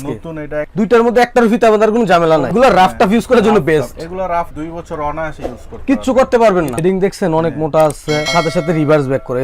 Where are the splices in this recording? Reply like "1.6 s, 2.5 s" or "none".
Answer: 2.5 s, 6.8 s